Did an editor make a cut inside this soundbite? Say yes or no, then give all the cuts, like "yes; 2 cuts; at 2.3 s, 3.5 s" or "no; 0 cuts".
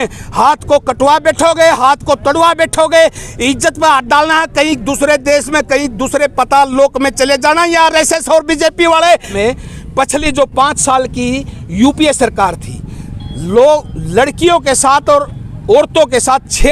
yes; 1 cut; at 9.3 s